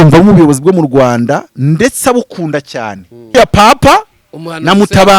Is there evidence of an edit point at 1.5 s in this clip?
no; 1 cut; at 3.3 s

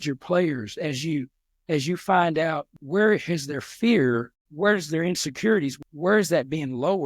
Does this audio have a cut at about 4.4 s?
yes; 3 cuts; at 2.7 s, 4.4 s, 5.7 s

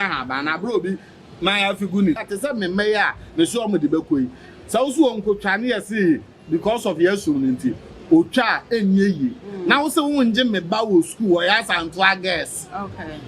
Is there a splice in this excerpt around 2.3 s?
yes; 1 cut; at 2.3 s

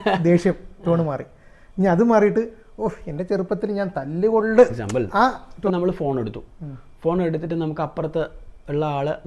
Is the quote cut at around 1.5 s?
no; 1 cut; at 5.7 s

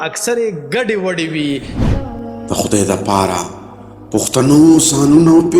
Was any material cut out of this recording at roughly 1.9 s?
yes; 1 cut; at 1.9 s

